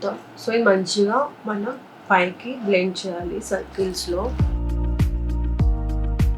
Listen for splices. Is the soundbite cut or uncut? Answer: cut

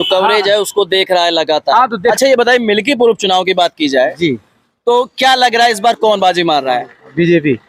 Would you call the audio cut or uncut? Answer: cut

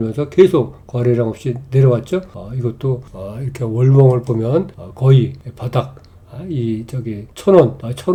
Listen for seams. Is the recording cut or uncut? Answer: uncut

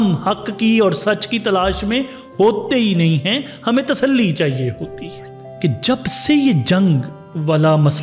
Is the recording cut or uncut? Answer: cut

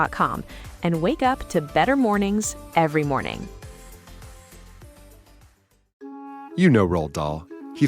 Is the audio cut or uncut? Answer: cut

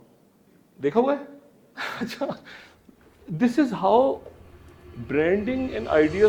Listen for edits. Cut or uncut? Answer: uncut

